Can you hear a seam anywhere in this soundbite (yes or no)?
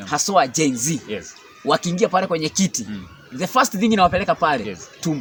no